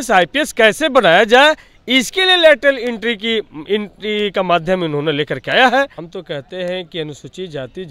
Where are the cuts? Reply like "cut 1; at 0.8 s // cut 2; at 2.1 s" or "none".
cut 1; at 6.0 s